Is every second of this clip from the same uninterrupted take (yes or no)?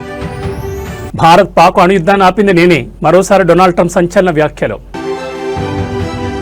no